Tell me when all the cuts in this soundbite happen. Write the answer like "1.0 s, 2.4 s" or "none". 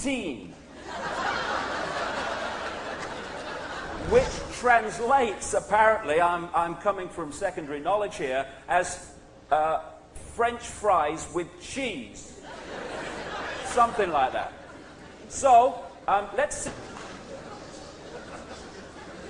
6.8 s